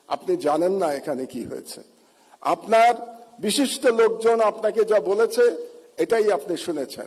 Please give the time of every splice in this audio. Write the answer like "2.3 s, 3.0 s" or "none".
none